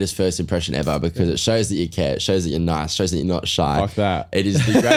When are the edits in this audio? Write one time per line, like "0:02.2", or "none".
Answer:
none